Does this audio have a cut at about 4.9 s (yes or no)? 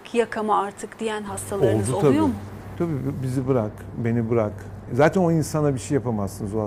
yes